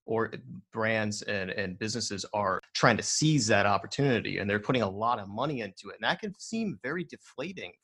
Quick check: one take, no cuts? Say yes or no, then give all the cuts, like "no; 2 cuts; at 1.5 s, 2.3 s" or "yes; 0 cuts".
no; 1 cut; at 2.7 s